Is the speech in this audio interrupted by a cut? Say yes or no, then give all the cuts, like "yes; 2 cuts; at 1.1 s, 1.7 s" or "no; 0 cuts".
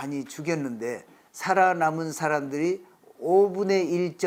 no; 0 cuts